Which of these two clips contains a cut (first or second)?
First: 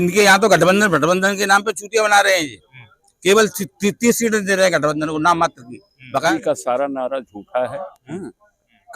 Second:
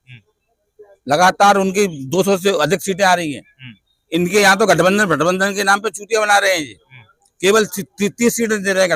first